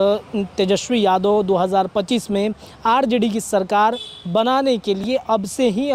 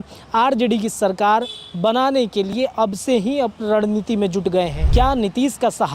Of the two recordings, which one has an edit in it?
second; 1 cut; at 4.8 s

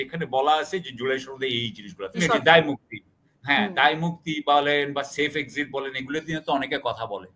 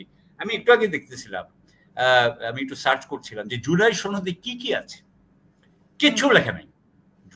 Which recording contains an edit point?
first; 1 cut; at 2.2 s

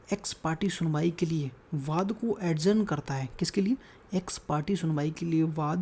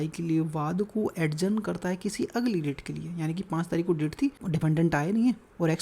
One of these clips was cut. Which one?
second; 1 cut; at 4.4 s

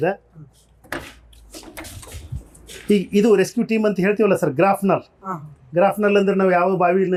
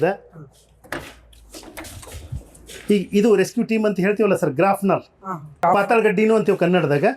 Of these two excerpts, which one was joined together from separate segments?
second; 1 cut; at 5.6 s

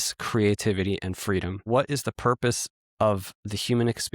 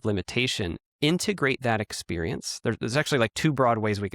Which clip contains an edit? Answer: first; 1 cut; at 1.7 s

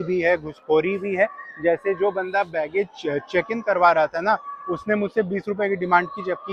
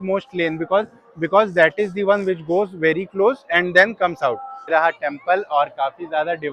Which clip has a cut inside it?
second; 1 cut; at 4.5 s

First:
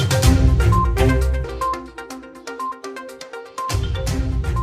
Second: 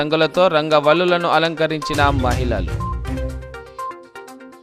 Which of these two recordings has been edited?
first; 1 cut; at 1.4 s

